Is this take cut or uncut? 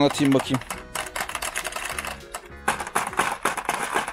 cut